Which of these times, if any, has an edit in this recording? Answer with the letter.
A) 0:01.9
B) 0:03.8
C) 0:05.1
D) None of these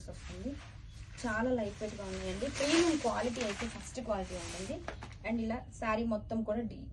D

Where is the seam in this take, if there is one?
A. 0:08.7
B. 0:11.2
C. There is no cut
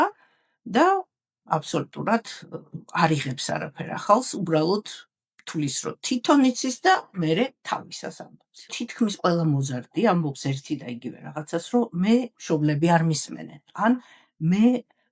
A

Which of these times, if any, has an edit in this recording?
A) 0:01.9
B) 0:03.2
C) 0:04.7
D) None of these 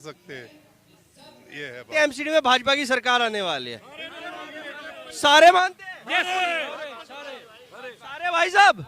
A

